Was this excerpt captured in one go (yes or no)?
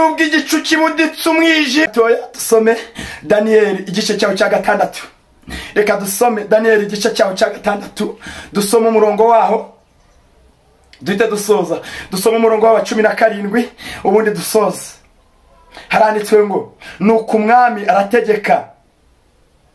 no